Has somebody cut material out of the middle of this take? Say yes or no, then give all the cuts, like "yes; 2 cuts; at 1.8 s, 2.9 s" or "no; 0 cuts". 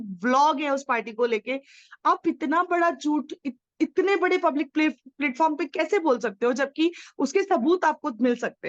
no; 0 cuts